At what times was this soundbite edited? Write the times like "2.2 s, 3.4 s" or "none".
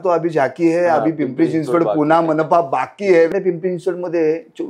3.3 s